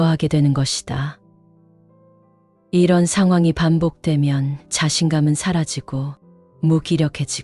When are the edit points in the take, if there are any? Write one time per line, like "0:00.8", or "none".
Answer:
0:01.2
0:02.7